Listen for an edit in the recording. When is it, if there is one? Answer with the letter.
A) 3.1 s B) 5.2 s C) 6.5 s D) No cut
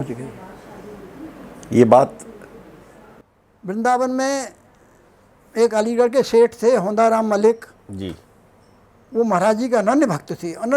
A